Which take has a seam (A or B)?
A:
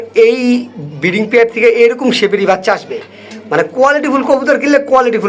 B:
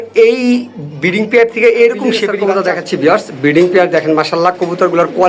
B